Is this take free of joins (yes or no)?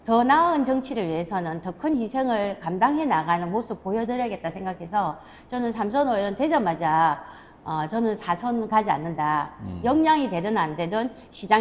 yes